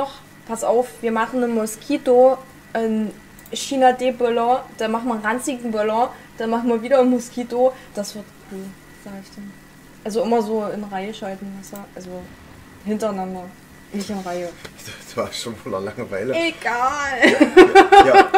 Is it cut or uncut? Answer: uncut